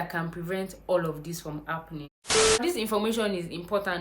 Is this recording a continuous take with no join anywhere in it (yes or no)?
no